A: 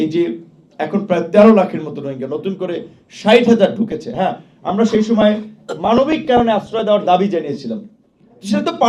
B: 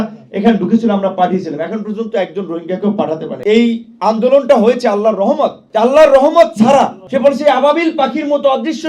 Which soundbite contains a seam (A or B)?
B